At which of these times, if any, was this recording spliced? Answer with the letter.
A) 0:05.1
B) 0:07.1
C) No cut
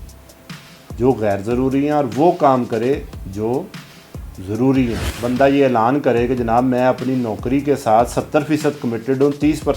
A